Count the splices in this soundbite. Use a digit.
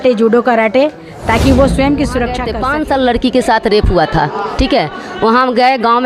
1